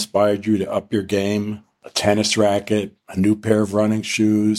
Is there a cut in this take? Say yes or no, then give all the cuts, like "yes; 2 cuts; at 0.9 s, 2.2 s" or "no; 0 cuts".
no; 0 cuts